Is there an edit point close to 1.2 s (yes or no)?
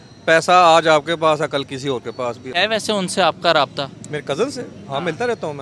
no